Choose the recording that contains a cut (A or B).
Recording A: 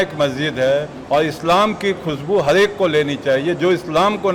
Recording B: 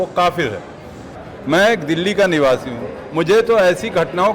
B